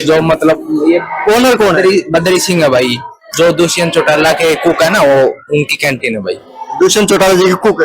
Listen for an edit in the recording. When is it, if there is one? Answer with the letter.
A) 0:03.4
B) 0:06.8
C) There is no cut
C